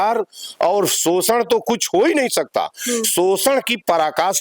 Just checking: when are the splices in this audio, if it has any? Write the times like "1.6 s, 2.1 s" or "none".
none